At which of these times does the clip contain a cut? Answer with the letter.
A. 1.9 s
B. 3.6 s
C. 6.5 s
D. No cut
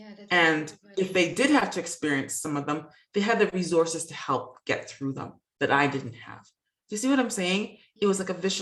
D